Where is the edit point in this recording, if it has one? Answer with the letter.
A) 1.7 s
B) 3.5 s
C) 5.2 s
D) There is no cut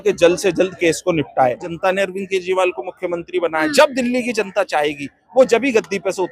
A